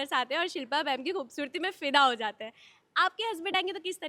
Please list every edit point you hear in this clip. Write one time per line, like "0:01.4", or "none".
none